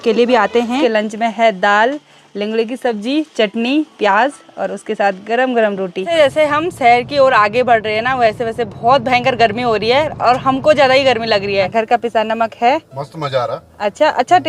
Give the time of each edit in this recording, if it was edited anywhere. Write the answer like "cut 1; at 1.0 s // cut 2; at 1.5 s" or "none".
cut 1; at 0.8 s // cut 2; at 6.1 s // cut 3; at 11.7 s